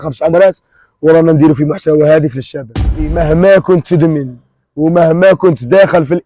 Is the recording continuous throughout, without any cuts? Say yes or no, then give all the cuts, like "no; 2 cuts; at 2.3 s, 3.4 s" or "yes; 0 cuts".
no; 1 cut; at 3.1 s